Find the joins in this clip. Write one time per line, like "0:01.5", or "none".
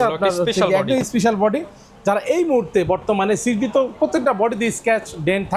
none